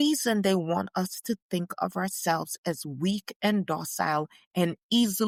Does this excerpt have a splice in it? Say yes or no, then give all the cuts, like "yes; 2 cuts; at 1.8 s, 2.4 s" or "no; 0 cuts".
no; 0 cuts